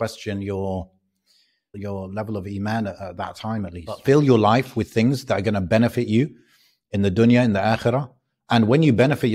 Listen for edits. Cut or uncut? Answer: cut